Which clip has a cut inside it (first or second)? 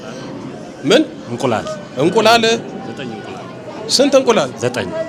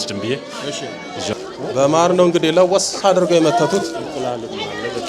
second